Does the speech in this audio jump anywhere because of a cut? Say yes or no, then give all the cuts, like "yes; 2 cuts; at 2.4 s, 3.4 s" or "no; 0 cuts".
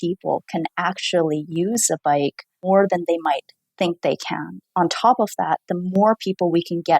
yes; 2 cuts; at 2.5 s, 4.6 s